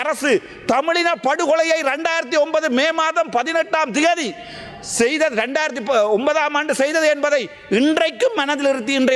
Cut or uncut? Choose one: uncut